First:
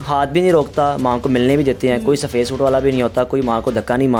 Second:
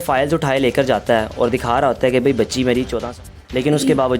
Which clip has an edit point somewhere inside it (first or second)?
second